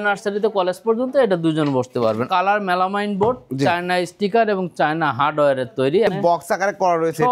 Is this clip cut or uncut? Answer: cut